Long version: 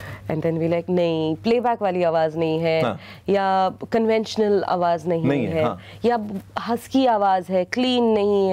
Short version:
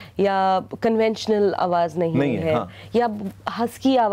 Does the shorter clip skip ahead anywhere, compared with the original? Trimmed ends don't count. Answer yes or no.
no